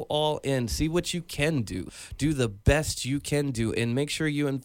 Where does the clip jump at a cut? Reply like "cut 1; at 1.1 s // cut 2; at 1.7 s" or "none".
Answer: cut 1; at 1.9 s